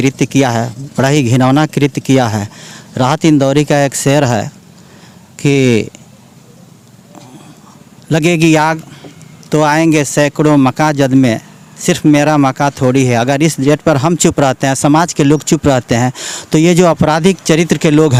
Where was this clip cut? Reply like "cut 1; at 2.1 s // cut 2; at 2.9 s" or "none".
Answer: none